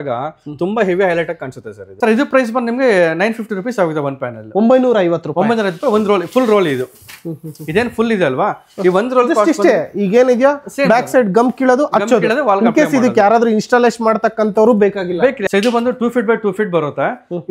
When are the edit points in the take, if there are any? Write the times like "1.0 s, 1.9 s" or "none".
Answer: 1.8 s, 15.4 s